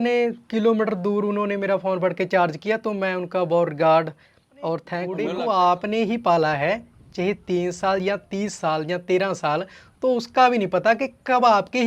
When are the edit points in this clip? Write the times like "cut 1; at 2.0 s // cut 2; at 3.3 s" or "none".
cut 1; at 5.1 s